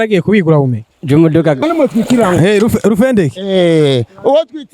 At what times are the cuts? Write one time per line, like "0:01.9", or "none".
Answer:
0:01.6